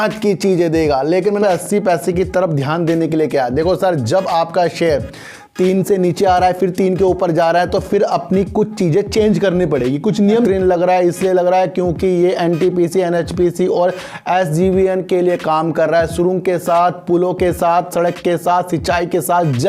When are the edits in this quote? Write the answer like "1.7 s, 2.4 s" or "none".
1.4 s, 10.5 s